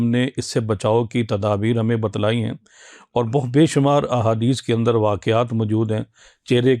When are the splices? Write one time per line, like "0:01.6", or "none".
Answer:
none